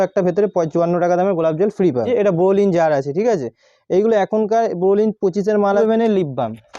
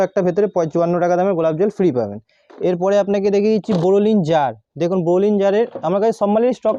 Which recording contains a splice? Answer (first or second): first